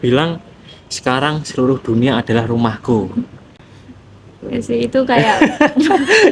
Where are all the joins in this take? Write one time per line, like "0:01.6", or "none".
none